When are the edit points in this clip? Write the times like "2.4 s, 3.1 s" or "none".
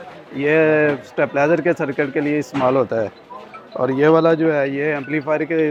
none

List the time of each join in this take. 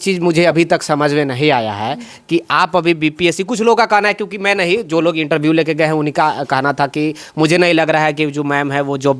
none

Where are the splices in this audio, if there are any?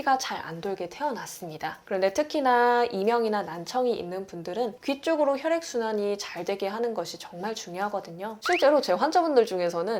8.3 s

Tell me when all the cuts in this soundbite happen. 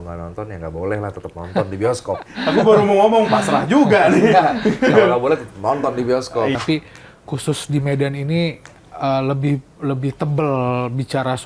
6.5 s

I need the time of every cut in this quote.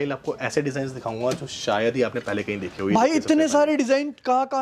none

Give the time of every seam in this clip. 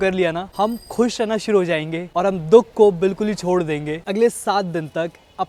none

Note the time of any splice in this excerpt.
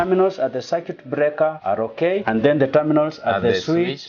1.7 s

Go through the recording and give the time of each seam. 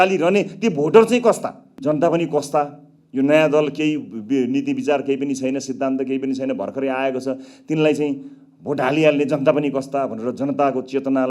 1.8 s

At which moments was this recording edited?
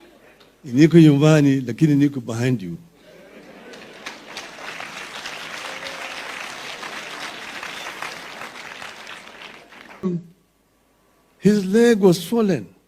10.1 s

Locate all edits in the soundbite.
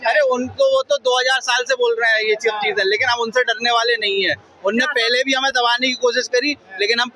none

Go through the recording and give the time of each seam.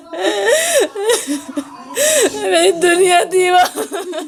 none

